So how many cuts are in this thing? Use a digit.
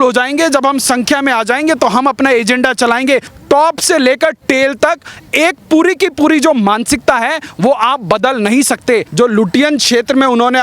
2